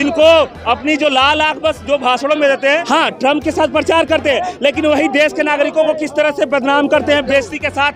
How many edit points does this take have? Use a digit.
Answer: 1